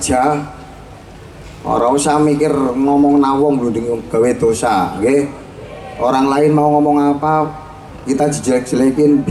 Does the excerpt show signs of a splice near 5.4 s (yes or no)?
no